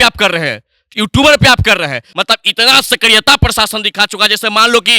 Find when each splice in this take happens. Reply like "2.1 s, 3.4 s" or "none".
2.0 s